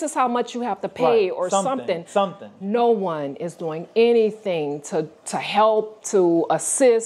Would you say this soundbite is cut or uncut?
uncut